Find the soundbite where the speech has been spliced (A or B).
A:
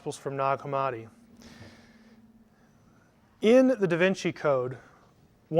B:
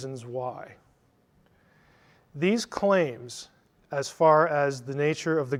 A